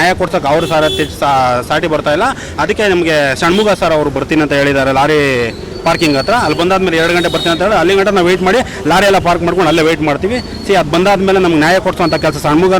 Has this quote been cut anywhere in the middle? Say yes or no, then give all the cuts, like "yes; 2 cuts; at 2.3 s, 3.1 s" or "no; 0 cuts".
no; 0 cuts